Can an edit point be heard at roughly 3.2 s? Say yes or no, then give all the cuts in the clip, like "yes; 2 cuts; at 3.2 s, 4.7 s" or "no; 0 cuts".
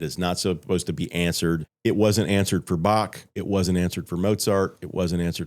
no; 1 cut; at 1.7 s